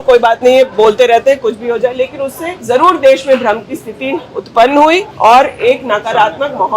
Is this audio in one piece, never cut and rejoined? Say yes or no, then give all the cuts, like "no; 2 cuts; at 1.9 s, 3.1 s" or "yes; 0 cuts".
no; 2 cuts; at 2.5 s, 5.1 s